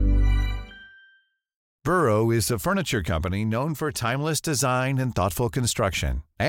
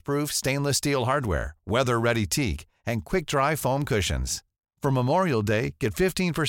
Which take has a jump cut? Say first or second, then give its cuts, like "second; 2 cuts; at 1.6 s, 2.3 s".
first; 1 cut; at 1.7 s